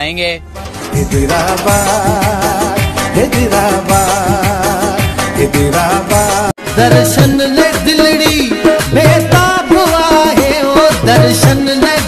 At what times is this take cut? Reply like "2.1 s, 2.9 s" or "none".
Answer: 6.5 s